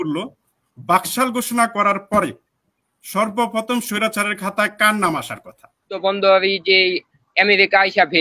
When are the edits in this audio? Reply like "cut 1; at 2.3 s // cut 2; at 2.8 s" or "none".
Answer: cut 1; at 5.9 s